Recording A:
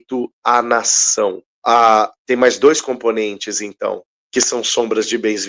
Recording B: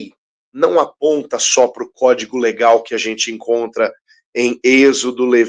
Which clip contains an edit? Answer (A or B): A